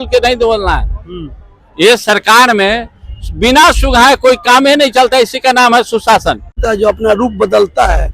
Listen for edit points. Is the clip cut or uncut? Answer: cut